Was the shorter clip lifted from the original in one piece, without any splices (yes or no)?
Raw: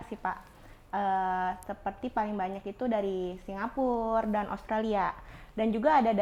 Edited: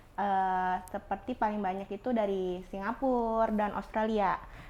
yes